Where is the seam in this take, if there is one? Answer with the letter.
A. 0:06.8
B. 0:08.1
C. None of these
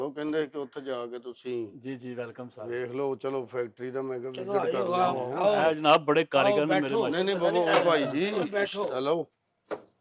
C